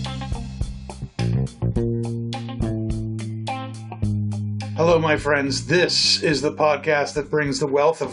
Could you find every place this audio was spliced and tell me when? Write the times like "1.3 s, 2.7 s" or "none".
4.7 s